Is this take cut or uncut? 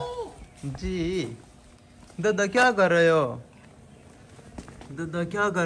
uncut